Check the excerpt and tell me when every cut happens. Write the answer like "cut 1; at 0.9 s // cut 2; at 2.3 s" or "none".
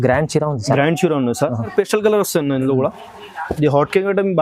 cut 1; at 1.7 s